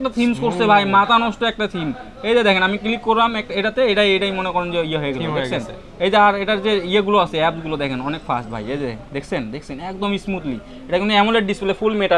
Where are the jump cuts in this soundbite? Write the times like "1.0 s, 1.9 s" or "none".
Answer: none